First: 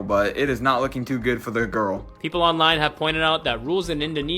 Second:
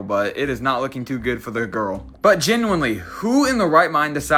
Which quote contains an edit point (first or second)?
first